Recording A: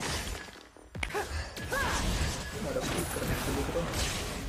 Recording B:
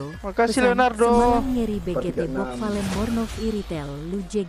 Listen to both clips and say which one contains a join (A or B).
A